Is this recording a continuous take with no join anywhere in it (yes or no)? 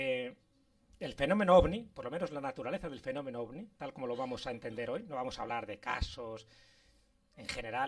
no